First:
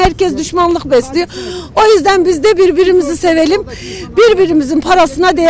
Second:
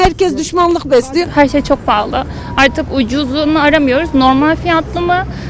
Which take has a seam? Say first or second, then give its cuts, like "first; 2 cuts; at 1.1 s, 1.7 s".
second; 1 cut; at 1.3 s